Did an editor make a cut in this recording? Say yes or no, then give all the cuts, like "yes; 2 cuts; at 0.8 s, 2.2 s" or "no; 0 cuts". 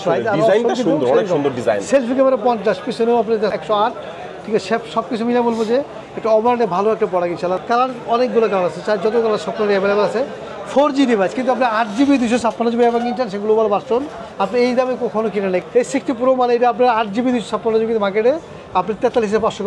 yes; 3 cuts; at 3.5 s, 7.6 s, 15.6 s